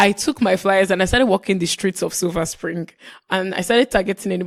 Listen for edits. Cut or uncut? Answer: uncut